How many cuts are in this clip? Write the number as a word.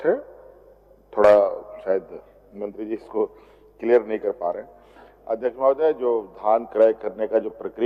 zero